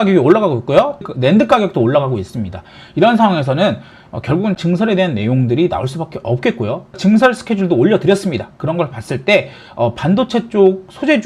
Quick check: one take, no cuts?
no; 3 cuts; at 1.1 s, 4.6 s, 7.0 s

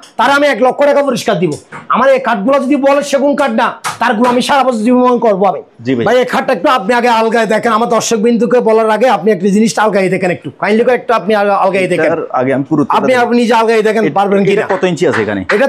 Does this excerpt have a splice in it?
yes; 1 cut; at 5.8 s

